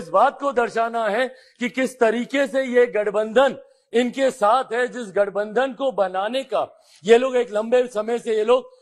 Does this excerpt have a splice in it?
no; 0 cuts

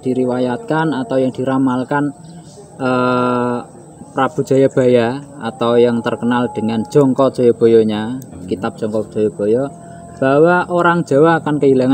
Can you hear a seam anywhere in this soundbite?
no; 0 cuts

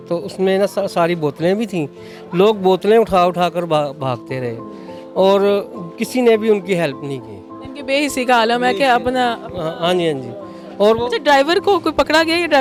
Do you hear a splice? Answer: no; 0 cuts

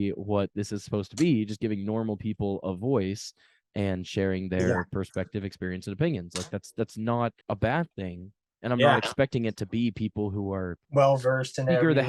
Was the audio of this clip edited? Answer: no; 0 cuts

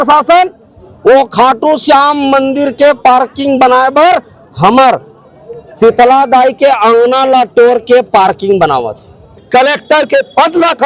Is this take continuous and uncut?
no; 1 cut; at 9.4 s

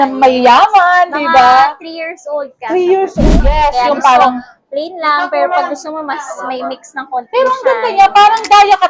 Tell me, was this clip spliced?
yes; 1 cut; at 3.2 s

